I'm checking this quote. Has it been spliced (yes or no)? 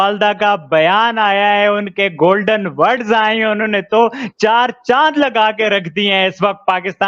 no